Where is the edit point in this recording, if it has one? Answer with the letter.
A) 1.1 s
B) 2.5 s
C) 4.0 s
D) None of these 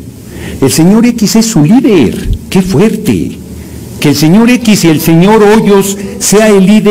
D